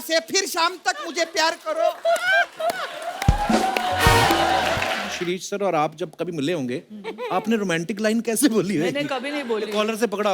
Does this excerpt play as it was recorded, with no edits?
no; 1 cut; at 5.1 s

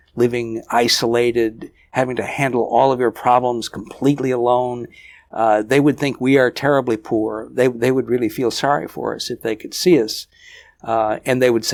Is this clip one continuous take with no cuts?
yes; 0 cuts

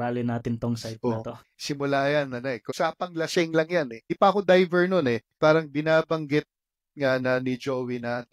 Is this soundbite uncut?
no; 4 cuts; at 1.0 s, 2.6 s, 4.1 s, 5.3 s

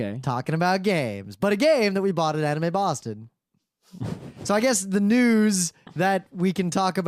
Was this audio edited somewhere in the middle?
yes; 1 cut; at 5.5 s

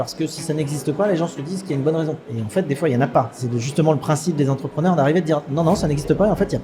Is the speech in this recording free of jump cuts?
no; 2 cuts; at 2.3 s, 3.4 s

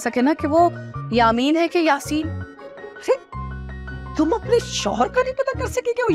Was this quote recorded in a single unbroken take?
yes; 0 cuts

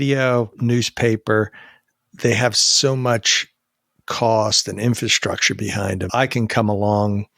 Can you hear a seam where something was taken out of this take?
yes; 1 cut; at 6.1 s

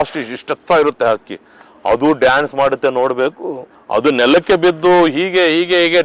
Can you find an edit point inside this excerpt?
yes; 1 cut; at 3.7 s

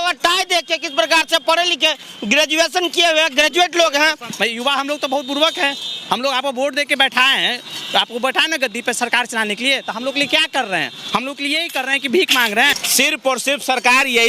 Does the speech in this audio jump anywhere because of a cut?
yes; 2 cuts; at 4.2 s, 12.7 s

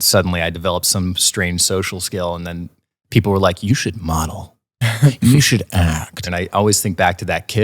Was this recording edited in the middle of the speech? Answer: yes; 1 cut; at 6.3 s

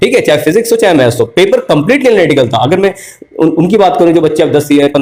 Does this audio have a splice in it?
no; 0 cuts

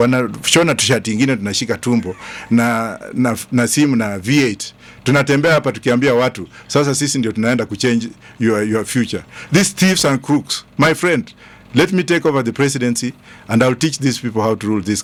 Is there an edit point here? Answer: no; 0 cuts

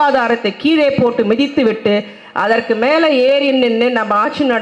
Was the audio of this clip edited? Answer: no; 0 cuts

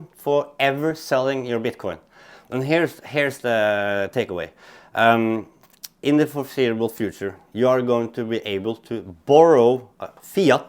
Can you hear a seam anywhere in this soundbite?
no; 0 cuts

